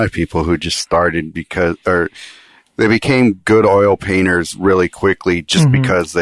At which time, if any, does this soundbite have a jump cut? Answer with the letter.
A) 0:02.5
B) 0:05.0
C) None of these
C